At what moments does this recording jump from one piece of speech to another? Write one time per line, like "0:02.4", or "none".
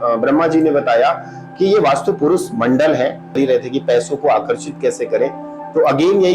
0:03.4